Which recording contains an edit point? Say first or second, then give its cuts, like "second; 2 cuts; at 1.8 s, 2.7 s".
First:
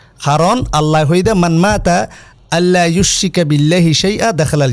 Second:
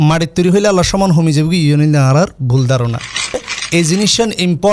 second; 1 cut; at 3.4 s